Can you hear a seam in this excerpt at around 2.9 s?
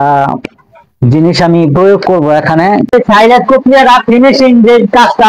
yes; 1 cut; at 2.9 s

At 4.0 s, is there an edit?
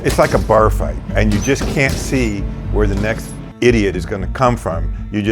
no; 1 cut; at 1.1 s

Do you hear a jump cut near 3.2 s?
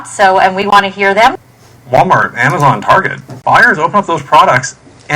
no; 1 cut; at 1.5 s

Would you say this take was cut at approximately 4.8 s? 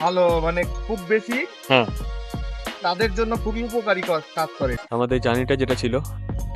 yes; 1 cut; at 4.8 s

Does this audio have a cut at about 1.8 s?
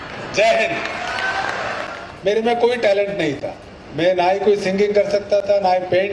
yes; 1 cut; at 1.8 s

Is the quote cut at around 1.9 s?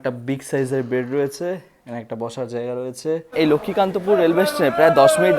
no; 1 cut; at 3.3 s

